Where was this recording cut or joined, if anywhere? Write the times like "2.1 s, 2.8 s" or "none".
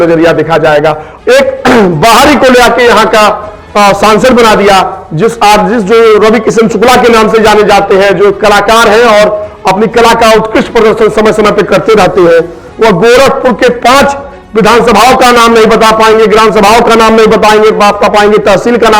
1.1 s